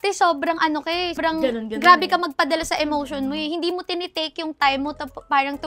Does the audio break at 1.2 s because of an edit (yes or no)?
yes